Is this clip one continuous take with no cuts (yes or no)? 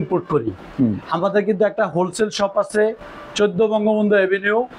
yes